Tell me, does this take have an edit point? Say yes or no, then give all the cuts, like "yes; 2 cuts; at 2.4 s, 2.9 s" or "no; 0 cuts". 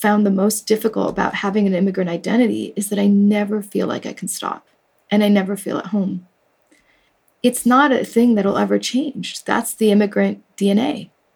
no; 0 cuts